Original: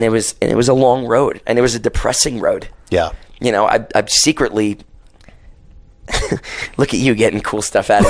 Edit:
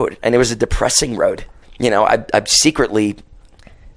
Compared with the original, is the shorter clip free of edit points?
no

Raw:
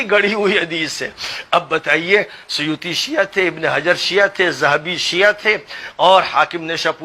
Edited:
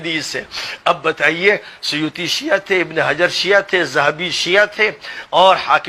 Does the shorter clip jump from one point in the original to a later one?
no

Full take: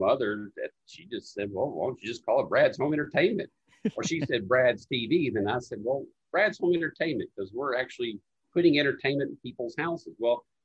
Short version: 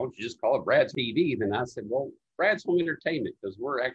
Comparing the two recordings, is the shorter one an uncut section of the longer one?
no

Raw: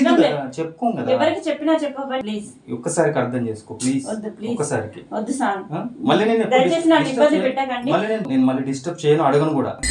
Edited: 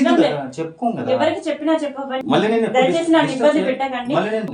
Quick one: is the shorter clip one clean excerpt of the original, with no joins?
no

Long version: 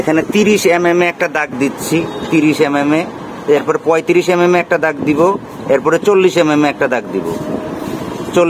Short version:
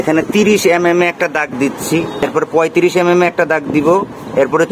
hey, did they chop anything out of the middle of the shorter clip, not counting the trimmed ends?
yes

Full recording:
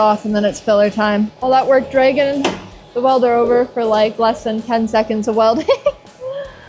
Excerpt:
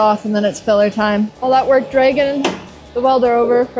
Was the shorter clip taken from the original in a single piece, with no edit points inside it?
yes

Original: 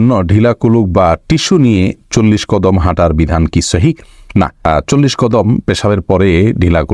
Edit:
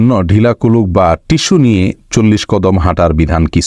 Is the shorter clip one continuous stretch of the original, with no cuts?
yes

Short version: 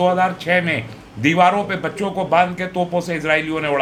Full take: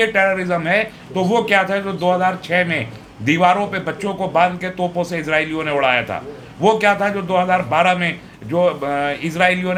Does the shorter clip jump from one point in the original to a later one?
no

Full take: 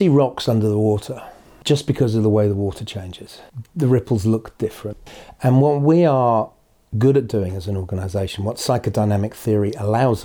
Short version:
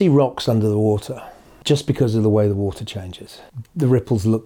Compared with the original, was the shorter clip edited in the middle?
no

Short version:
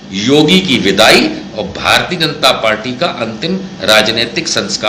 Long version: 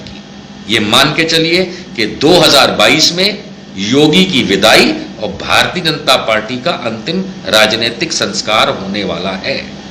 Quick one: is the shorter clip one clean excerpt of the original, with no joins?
yes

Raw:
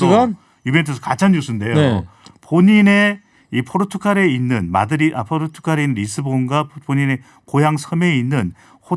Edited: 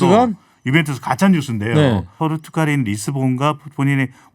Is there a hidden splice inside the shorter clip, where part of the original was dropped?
yes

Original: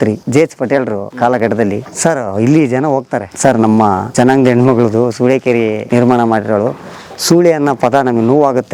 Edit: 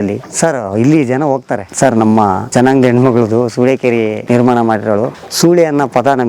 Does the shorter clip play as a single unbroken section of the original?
no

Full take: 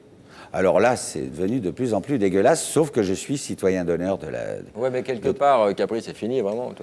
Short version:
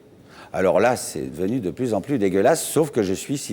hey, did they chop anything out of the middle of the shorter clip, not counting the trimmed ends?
no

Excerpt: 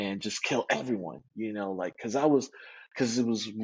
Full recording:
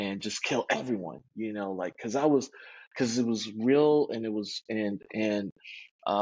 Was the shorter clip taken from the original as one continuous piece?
yes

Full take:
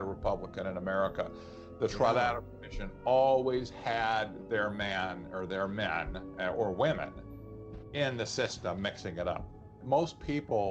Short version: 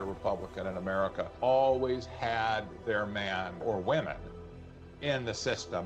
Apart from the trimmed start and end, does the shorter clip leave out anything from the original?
yes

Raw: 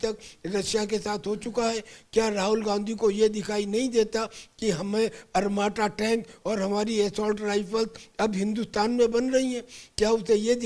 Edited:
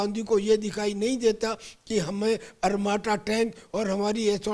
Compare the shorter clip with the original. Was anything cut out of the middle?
no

